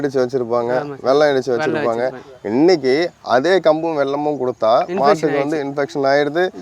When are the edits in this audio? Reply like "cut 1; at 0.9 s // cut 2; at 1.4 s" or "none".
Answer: none